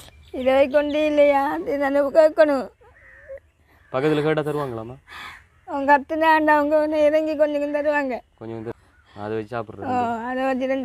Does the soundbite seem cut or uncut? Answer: cut